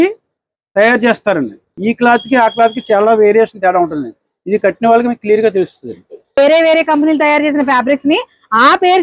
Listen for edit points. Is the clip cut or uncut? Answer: cut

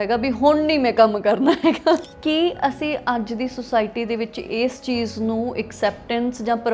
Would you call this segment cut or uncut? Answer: cut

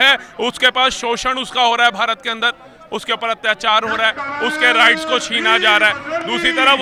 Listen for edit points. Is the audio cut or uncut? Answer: uncut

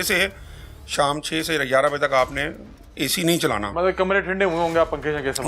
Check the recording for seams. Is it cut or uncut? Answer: uncut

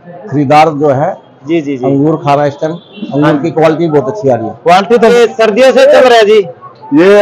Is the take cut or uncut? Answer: cut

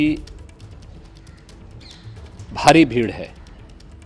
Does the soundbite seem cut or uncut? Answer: uncut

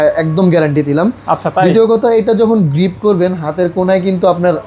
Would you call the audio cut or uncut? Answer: uncut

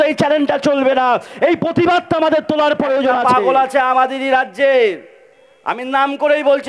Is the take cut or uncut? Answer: cut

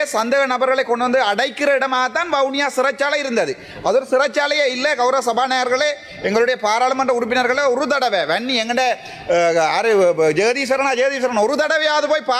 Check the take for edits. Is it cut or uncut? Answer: uncut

